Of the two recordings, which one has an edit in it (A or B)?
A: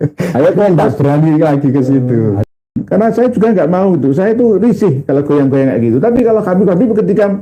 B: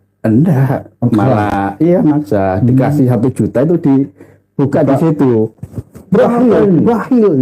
A